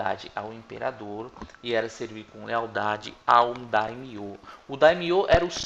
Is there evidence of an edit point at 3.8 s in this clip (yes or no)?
yes